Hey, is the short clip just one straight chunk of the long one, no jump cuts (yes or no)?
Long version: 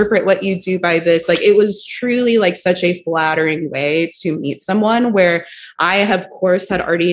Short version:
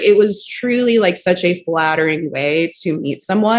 yes